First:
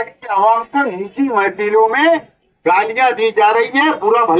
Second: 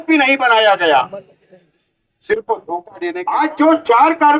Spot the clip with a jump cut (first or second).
second